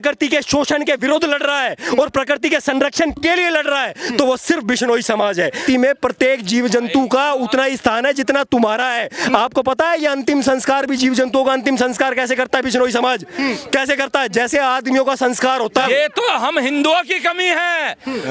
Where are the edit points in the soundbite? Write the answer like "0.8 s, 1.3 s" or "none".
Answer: 5.6 s, 15.8 s